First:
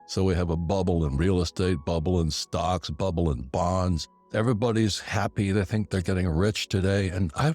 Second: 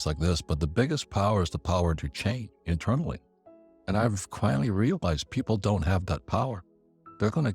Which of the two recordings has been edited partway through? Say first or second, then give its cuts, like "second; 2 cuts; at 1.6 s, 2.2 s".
first; 1 cut; at 4.1 s